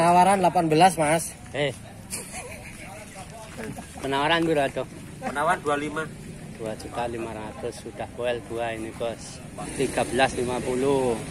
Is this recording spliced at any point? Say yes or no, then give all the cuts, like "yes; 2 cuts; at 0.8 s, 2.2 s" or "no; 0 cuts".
yes; 1 cut; at 9.7 s